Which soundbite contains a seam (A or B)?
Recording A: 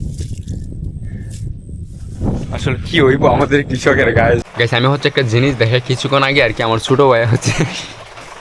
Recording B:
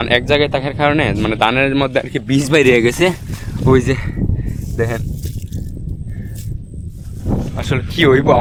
A